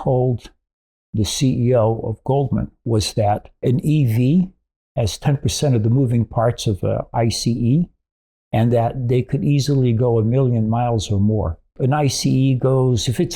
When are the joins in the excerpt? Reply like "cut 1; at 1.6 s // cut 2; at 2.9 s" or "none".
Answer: cut 1; at 3.6 s // cut 2; at 11.7 s